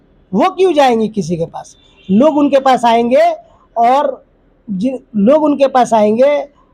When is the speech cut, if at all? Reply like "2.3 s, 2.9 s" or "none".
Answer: none